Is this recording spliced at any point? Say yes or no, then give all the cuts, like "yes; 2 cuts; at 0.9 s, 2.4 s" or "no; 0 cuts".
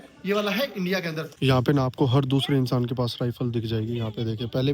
yes; 1 cut; at 1.3 s